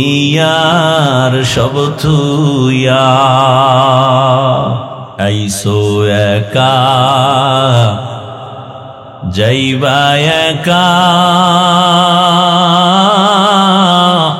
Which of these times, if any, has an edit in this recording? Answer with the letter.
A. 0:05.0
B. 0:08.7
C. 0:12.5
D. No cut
A